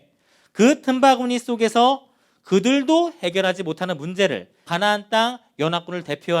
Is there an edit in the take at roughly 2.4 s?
no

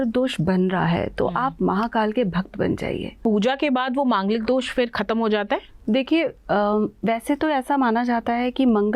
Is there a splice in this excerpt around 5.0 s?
no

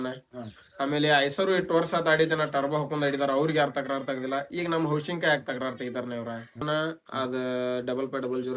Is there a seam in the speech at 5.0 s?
no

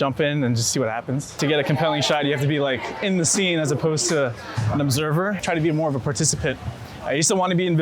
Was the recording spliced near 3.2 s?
no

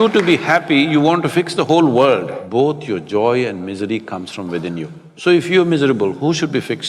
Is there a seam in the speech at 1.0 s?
no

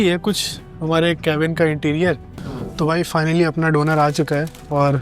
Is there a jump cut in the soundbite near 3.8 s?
no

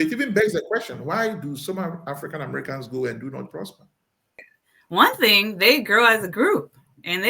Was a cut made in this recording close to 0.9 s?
no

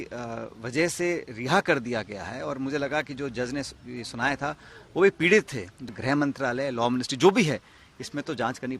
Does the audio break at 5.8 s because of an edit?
yes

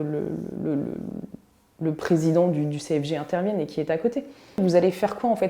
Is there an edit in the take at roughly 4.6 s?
yes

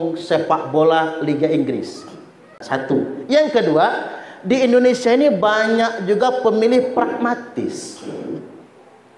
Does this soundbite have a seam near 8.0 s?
no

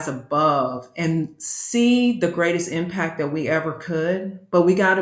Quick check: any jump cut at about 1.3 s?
yes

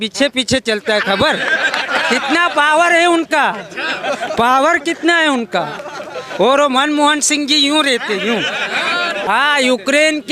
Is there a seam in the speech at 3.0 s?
no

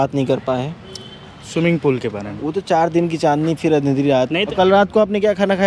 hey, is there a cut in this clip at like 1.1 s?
no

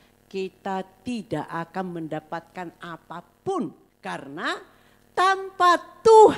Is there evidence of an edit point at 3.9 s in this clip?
yes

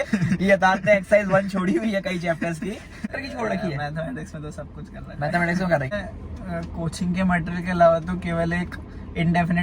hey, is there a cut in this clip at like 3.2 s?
yes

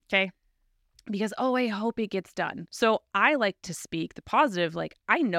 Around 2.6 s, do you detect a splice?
yes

